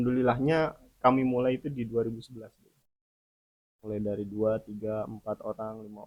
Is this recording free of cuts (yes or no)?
yes